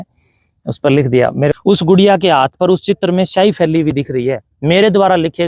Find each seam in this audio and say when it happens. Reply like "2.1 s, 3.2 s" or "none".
1.5 s